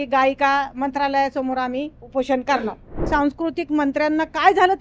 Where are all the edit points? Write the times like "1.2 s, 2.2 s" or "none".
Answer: 3.1 s